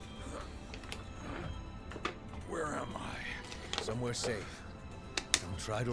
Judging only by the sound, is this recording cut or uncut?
uncut